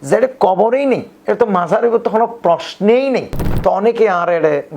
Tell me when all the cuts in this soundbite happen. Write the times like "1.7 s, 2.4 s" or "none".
3.5 s